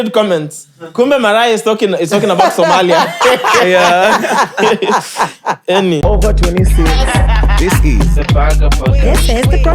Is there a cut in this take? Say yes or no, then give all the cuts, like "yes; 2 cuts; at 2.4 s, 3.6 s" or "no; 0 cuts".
yes; 1 cut; at 6.0 s